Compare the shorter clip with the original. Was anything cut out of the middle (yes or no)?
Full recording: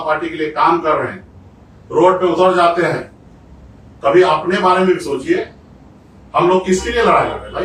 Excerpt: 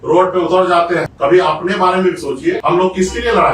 yes